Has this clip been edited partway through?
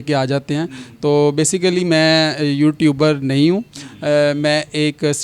no; 0 cuts

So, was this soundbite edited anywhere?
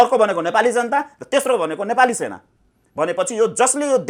no; 0 cuts

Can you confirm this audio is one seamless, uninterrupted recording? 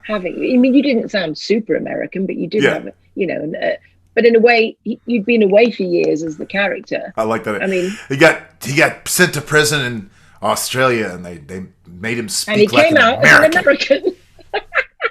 yes; 0 cuts

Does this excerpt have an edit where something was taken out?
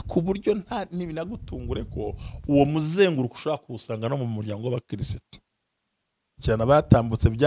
yes; 1 cut; at 6.3 s

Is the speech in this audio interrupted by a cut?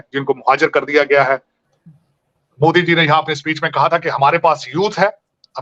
yes; 1 cut; at 1.6 s

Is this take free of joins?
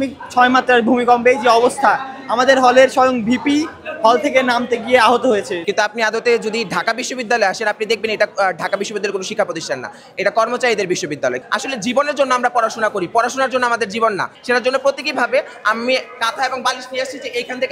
no; 3 cuts; at 5.6 s, 11.4 s, 14.3 s

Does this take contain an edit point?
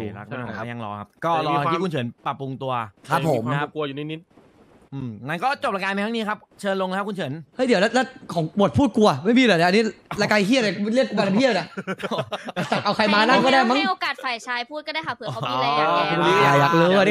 no; 0 cuts

